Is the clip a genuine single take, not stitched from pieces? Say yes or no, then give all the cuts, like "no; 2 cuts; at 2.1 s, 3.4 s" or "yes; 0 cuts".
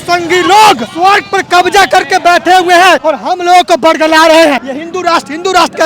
no; 3 cuts; at 0.9 s, 3.0 s, 4.7 s